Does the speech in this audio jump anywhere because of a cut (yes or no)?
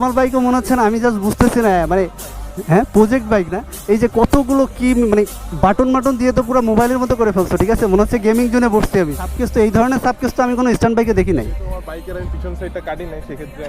yes